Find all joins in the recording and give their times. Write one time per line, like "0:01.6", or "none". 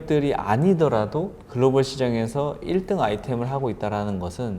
0:01.4